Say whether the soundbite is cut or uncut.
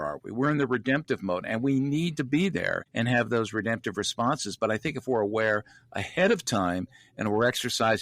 cut